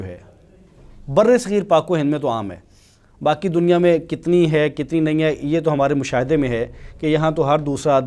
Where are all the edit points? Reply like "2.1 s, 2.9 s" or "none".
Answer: none